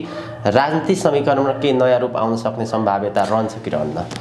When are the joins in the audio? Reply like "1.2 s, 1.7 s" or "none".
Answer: none